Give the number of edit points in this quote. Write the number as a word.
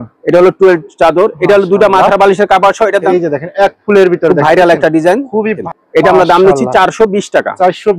two